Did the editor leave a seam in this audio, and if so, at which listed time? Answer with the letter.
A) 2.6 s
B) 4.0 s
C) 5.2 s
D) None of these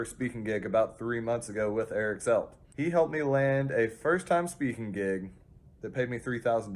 A